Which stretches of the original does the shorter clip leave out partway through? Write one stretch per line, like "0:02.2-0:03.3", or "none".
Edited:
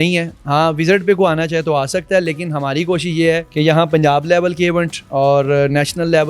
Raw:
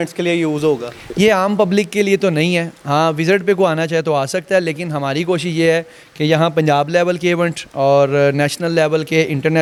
0:05.9-0:06.1